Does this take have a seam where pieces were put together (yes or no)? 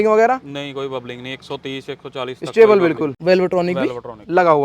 yes